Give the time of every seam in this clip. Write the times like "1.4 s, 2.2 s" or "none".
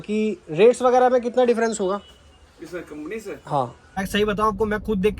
4.0 s